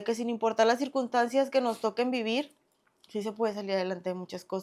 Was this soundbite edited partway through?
no; 0 cuts

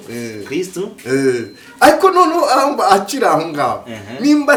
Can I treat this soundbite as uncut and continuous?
yes; 0 cuts

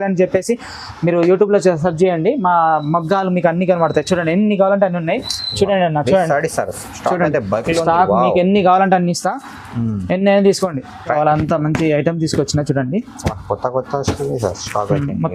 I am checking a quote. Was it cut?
yes; 1 cut; at 11.1 s

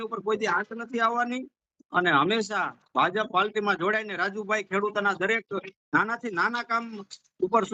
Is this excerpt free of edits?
yes; 0 cuts

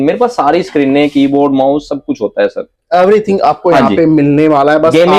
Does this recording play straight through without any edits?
yes; 0 cuts

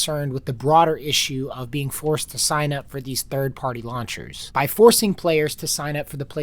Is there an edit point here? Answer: yes; 1 cut; at 4.4 s

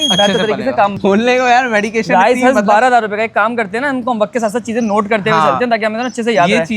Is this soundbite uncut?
no; 1 cut; at 1.0 s

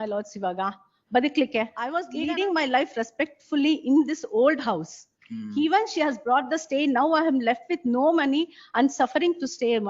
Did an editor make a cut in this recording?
yes; 1 cut; at 2.0 s

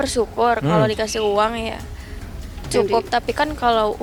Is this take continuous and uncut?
yes; 0 cuts

